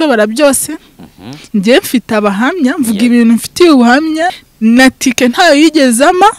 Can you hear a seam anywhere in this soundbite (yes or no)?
yes